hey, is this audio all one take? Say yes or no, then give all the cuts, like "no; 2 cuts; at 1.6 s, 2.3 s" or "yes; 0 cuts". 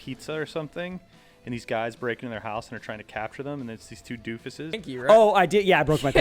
no; 1 cut; at 4.9 s